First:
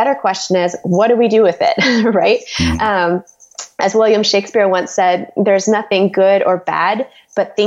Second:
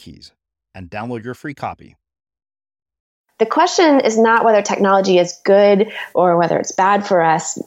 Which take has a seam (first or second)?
second